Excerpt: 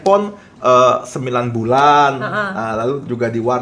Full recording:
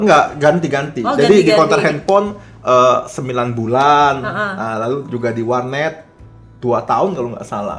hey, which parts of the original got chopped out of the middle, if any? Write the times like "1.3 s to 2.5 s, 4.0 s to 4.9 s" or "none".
none

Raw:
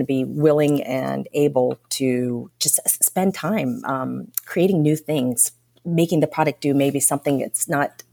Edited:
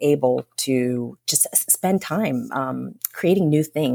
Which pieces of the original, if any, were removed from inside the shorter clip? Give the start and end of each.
none

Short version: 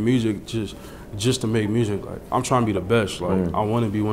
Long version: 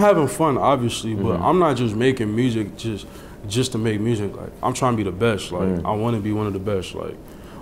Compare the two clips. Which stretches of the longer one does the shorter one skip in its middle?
none

